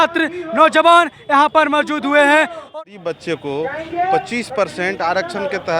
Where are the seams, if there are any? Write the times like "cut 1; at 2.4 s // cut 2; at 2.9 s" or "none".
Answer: cut 1; at 2.7 s